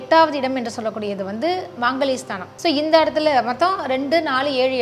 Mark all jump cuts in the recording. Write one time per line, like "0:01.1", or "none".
0:02.4